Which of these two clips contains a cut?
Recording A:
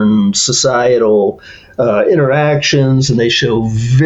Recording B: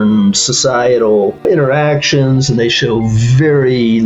B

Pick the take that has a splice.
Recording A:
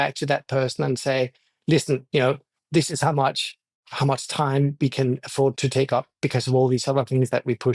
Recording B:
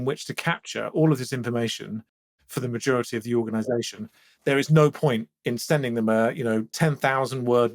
A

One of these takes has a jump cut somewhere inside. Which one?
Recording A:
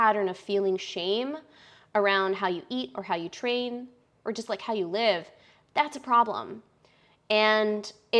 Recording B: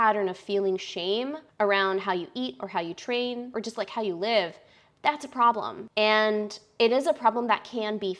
B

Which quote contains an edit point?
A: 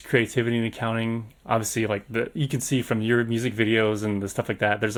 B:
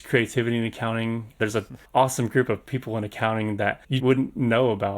B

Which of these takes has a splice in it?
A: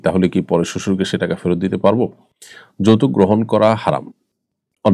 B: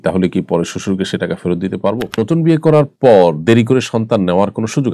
B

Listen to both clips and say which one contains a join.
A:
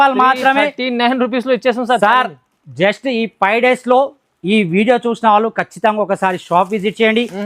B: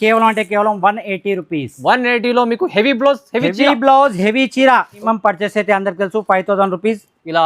B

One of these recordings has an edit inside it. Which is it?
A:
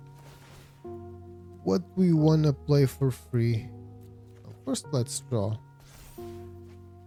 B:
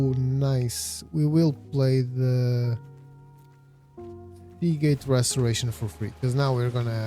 B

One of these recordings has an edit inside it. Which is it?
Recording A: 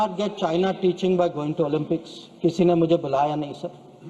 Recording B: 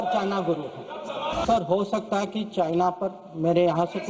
B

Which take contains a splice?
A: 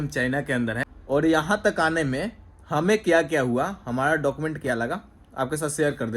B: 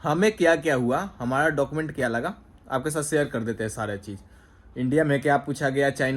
A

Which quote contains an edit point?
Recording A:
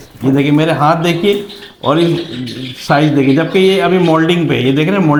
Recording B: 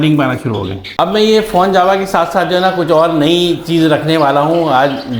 B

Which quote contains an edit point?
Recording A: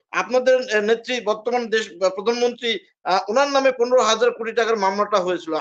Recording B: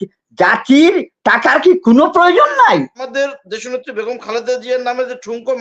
B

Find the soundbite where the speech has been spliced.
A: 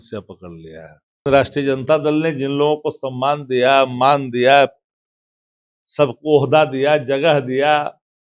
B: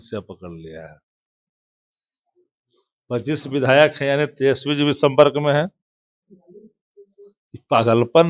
A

